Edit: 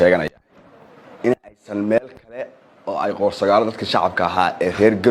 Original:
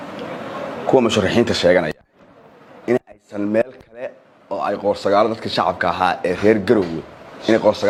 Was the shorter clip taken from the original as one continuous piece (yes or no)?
yes